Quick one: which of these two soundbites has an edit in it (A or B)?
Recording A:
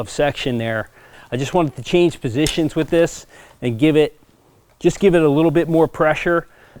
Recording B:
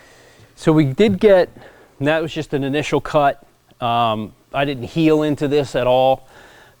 A